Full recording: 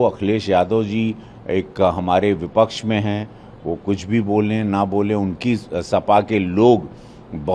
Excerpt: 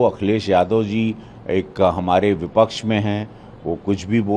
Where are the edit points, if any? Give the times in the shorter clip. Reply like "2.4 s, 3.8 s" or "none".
none